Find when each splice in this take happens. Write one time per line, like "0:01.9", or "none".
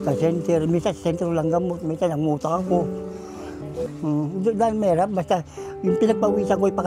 0:03.9